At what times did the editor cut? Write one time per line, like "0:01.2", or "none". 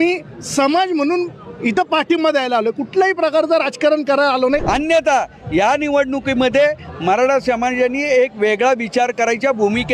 0:04.6